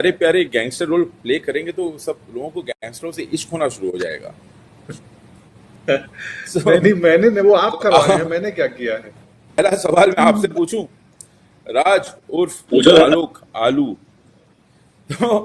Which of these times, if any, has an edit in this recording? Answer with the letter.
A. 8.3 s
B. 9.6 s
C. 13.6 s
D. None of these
B